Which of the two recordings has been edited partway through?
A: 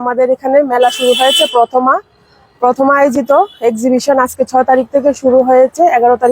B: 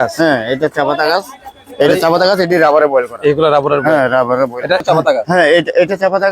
B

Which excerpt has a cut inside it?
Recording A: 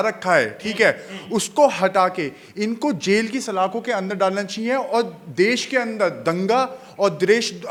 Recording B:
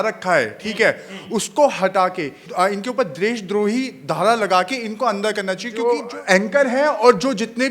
B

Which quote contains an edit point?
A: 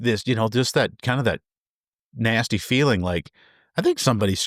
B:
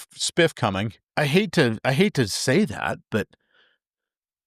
B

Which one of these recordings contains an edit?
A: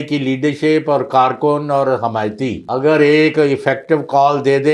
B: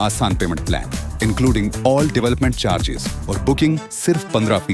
A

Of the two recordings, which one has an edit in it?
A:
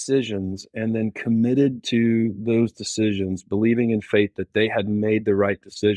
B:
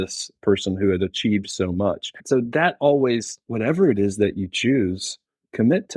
B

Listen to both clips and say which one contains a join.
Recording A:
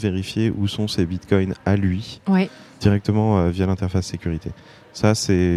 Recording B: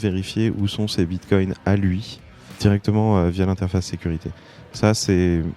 B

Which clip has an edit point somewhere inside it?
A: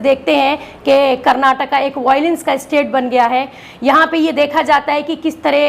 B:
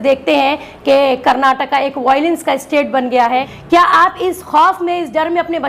B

